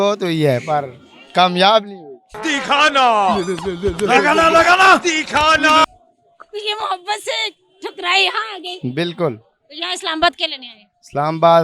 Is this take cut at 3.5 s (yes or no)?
no